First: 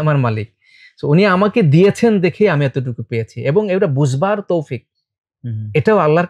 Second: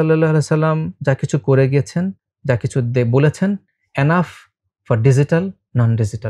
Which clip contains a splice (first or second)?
second